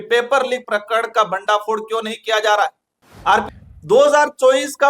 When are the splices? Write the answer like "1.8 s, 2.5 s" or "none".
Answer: 3.5 s